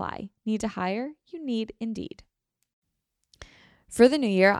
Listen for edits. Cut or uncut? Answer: cut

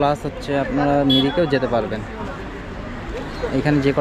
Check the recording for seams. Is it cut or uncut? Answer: uncut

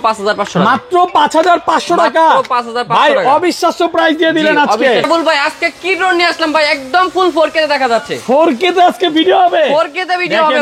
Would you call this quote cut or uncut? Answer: cut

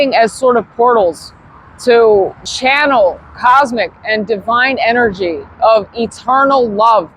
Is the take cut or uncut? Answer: cut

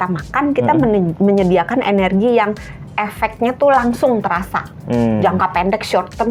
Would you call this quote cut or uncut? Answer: uncut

